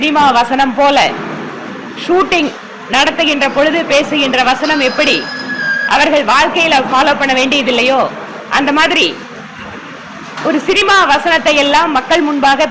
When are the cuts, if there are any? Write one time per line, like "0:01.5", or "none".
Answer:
none